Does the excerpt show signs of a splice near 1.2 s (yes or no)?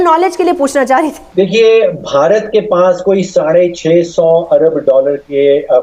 yes